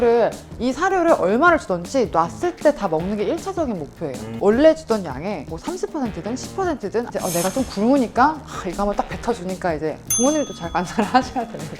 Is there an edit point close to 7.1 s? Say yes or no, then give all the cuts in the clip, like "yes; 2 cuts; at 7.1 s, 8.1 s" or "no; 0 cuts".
yes; 3 cuts; at 4.3 s, 7.1 s, 10.0 s